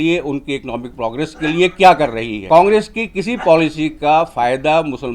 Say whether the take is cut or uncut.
cut